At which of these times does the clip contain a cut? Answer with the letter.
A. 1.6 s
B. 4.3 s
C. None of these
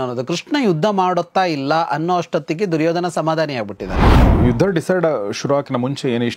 B